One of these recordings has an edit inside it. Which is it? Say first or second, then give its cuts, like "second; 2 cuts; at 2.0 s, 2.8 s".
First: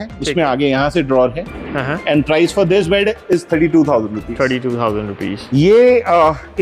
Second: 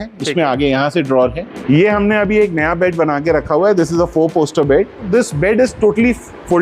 second; 2 cuts; at 1.5 s, 5.1 s